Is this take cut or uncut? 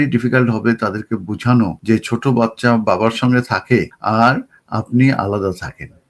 cut